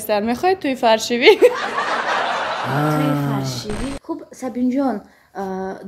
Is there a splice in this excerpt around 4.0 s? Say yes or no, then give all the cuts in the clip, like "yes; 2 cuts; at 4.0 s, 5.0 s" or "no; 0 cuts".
yes; 1 cut; at 4.0 s